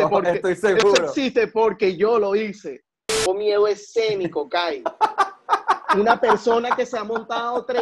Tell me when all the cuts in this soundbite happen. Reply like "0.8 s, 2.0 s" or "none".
3.2 s